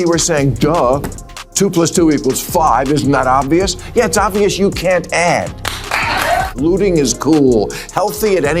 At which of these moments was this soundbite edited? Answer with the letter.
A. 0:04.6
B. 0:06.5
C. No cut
B